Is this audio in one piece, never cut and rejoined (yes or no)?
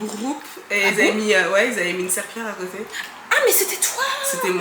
yes